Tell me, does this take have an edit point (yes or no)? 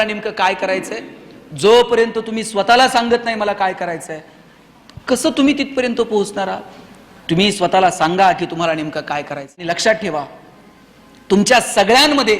yes